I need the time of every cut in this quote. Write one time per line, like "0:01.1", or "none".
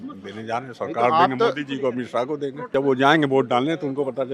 0:02.7